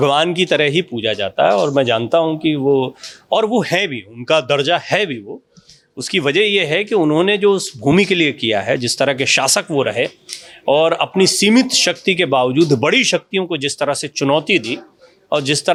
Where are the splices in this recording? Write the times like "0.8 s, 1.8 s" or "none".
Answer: none